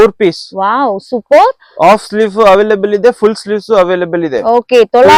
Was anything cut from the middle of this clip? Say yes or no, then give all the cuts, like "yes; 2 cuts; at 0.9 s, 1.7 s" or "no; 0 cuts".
no; 0 cuts